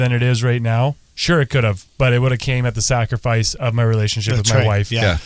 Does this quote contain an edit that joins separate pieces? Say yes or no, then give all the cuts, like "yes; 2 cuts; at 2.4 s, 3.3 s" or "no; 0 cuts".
no; 0 cuts